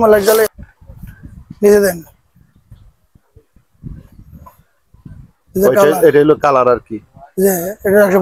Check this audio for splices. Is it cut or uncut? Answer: uncut